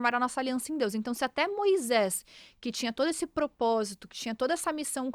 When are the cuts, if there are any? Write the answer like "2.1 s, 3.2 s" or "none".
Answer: none